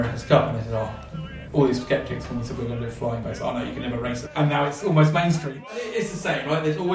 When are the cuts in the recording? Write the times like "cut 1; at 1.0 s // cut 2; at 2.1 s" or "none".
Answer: cut 1; at 4.2 s // cut 2; at 5.5 s